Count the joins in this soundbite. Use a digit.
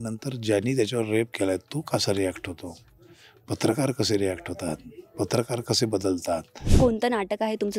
1